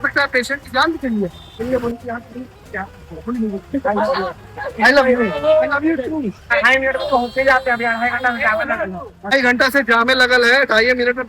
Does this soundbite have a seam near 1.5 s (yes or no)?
yes